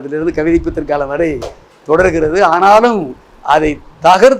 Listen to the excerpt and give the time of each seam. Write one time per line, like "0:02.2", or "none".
none